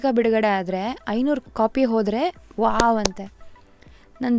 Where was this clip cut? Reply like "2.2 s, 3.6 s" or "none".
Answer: 1.4 s